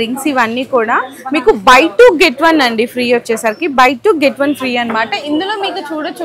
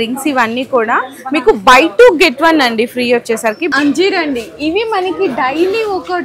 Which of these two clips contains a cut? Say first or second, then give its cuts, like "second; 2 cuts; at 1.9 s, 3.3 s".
second; 1 cut; at 3.7 s